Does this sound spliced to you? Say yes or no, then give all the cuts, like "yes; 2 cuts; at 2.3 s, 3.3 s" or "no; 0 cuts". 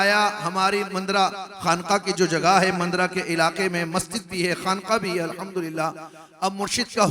no; 0 cuts